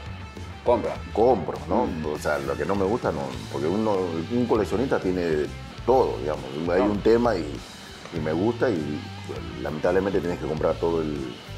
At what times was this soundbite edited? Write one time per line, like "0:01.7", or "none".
none